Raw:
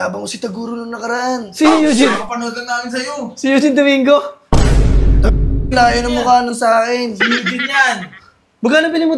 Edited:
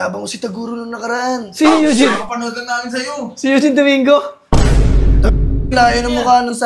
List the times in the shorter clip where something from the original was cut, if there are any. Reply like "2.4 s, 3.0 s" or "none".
none